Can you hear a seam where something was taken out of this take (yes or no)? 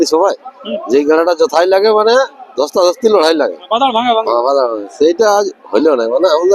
no